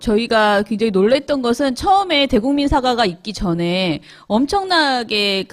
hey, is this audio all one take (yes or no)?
no